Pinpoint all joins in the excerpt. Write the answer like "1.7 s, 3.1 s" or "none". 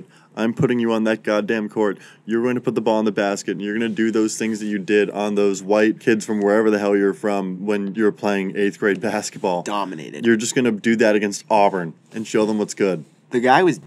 5.8 s, 7.7 s